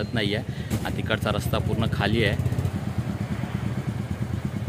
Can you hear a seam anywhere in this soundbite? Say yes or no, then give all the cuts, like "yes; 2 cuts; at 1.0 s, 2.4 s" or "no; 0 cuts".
yes; 1 cut; at 2.7 s